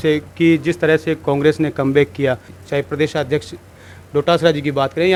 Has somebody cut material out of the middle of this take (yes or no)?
no